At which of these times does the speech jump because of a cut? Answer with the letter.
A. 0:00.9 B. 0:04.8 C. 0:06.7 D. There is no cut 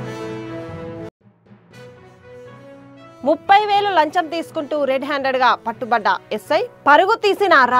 A